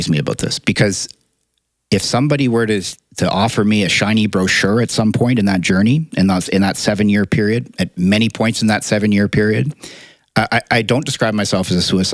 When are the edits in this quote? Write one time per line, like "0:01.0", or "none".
none